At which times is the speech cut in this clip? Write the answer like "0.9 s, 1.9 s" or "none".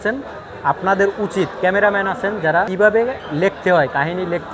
2.7 s